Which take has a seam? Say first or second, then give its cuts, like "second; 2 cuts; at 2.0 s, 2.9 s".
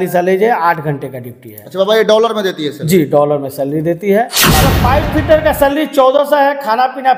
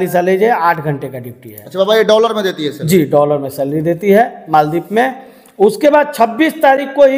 first; 1 cut; at 4.6 s